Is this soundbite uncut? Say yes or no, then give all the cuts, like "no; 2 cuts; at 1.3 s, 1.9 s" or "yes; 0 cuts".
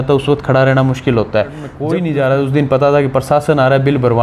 no; 1 cut; at 1.7 s